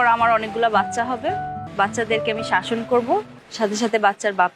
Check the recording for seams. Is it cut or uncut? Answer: cut